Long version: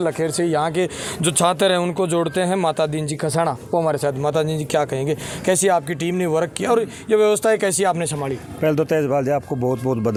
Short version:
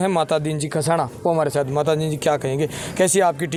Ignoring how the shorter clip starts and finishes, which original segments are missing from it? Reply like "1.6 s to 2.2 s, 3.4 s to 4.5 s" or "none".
none